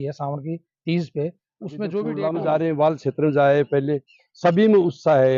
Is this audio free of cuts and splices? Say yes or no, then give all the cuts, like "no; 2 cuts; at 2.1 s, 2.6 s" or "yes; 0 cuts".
no; 1 cut; at 2.1 s